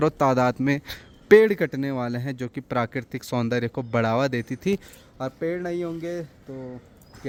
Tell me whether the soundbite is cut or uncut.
uncut